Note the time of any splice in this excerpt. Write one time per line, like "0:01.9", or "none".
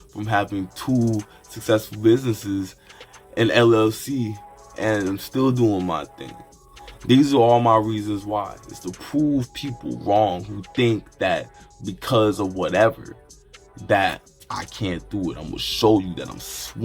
0:06.8